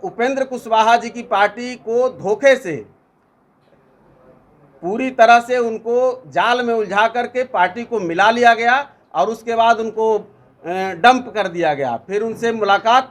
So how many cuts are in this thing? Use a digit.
0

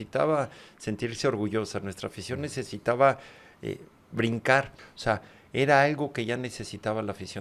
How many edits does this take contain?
1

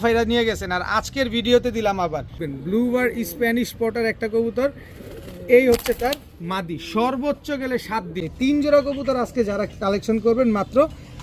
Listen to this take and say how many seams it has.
2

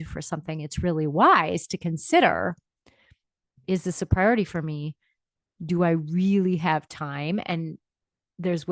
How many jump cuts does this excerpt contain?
0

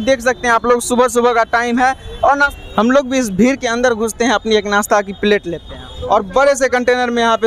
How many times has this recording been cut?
2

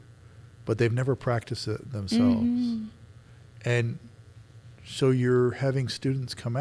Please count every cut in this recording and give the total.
0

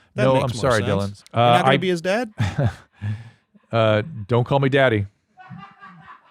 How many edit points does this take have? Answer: 2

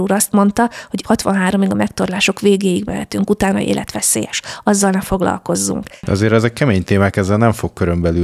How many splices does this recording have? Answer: 2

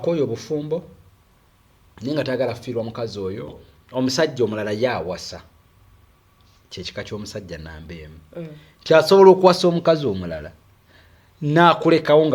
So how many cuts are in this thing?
1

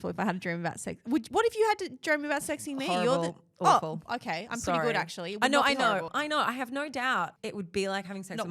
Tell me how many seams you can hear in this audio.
2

